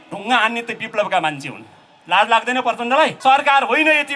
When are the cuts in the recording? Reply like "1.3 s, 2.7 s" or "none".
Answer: 3.2 s